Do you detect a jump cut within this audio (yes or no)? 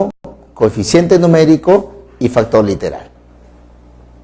yes